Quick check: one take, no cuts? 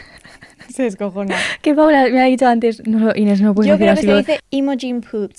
no; 1 cut; at 4.4 s

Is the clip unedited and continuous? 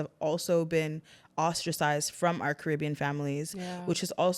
yes; 0 cuts

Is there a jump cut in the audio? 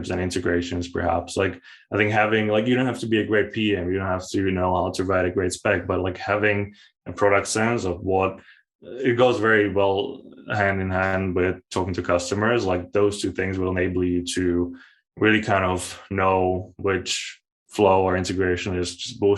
no; 0 cuts

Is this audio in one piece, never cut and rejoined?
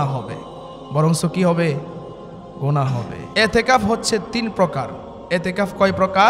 no; 1 cut; at 3.2 s

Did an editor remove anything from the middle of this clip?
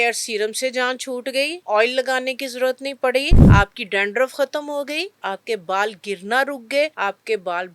yes; 4 cuts; at 1.6 s, 3.4 s, 5.1 s, 6.9 s

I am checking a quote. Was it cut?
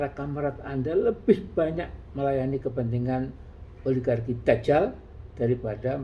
no; 0 cuts

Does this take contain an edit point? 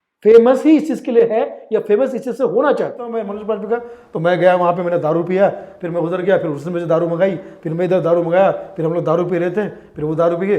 yes; 1 cut; at 3.3 s

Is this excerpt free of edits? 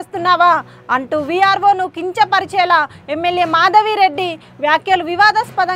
yes; 0 cuts

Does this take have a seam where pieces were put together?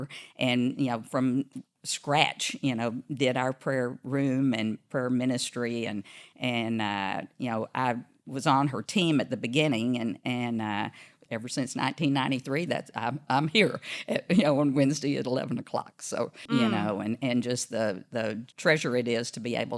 yes; 3 cuts; at 11.2 s, 16.4 s, 18.5 s

